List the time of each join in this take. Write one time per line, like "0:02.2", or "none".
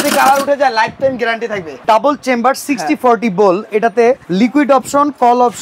0:01.8
0:04.3